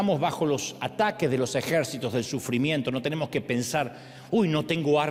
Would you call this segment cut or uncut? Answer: uncut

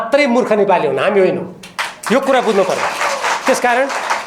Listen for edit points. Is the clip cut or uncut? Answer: uncut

